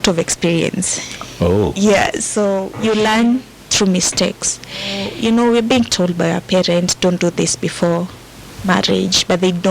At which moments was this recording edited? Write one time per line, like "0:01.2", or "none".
0:02.7
0:05.1